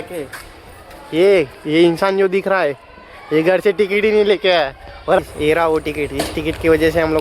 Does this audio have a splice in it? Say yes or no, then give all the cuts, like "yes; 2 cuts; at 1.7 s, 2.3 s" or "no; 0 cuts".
yes; 1 cut; at 5.2 s